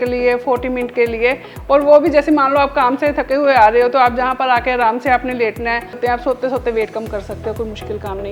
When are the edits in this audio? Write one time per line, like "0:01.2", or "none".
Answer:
0:06.0